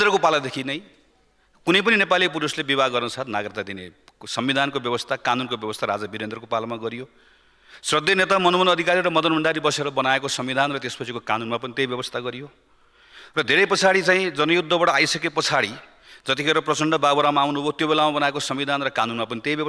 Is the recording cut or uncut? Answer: uncut